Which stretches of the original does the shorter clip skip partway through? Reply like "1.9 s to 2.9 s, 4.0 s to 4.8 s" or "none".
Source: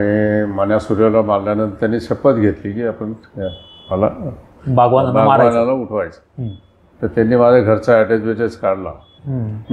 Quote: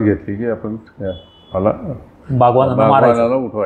none

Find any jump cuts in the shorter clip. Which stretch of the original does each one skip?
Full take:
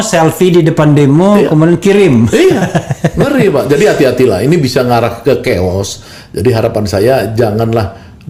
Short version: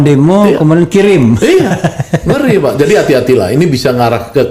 none

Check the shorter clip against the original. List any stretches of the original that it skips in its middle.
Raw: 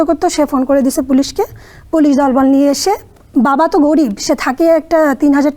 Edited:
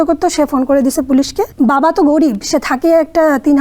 1.4 s to 3.2 s

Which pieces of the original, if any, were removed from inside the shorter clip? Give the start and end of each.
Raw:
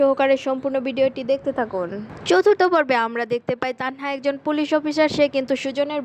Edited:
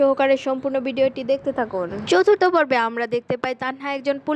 2.0 s to 2.1 s

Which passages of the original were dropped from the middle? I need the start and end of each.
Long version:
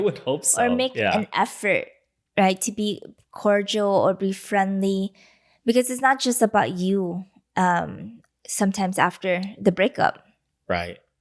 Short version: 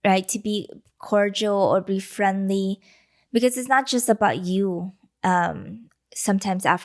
none

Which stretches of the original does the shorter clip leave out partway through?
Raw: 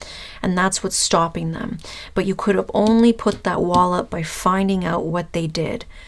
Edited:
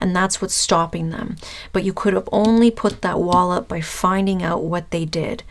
none

